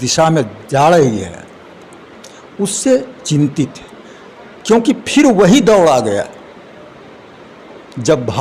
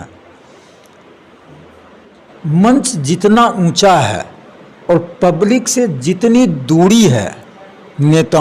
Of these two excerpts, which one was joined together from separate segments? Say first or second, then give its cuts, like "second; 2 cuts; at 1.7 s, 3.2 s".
second; 1 cut; at 2.2 s